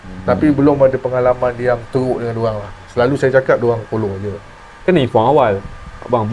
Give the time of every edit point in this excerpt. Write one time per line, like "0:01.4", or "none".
0:04.6